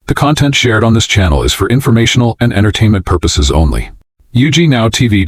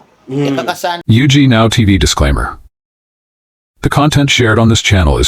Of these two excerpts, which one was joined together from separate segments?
second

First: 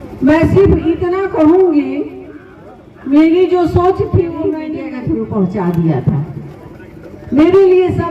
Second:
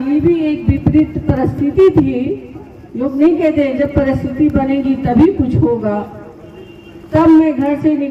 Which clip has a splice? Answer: first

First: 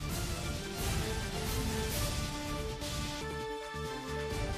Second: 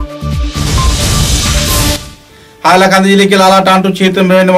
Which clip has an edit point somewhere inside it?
second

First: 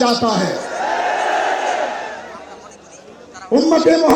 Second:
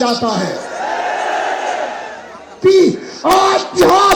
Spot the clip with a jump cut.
second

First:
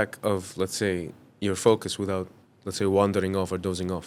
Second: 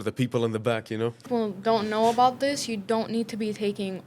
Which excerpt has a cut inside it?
second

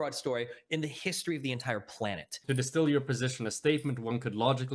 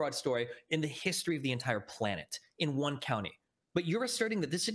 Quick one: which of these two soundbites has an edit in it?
first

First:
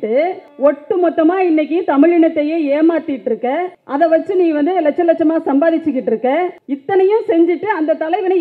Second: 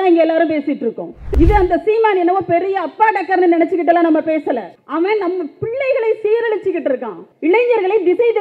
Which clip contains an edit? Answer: second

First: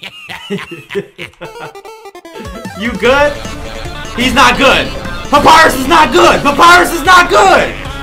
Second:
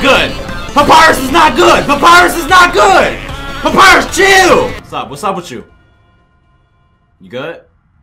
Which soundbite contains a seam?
second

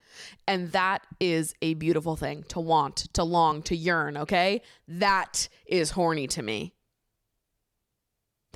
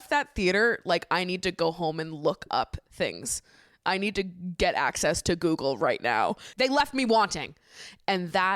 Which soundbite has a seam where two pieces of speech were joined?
second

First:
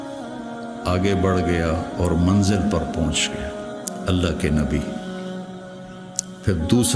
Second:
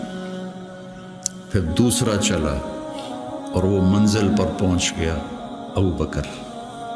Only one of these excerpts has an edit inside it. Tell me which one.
first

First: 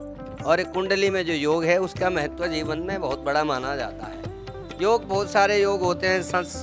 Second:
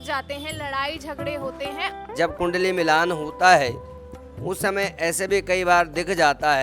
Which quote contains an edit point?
second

